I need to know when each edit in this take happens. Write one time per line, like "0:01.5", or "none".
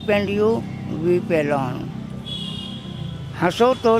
none